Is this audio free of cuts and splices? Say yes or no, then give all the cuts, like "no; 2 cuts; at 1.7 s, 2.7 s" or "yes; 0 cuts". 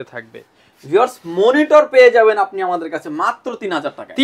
yes; 0 cuts